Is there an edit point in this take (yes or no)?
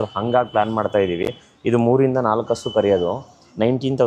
no